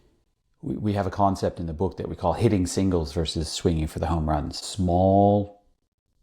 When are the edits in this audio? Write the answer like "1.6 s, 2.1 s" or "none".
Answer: 4.6 s